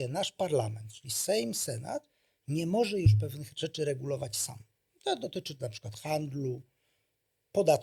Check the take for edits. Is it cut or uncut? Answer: uncut